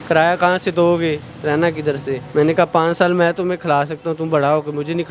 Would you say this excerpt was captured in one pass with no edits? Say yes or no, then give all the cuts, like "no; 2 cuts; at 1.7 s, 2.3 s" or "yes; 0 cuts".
no; 1 cut; at 2.3 s